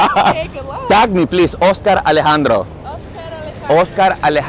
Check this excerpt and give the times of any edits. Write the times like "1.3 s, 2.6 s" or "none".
none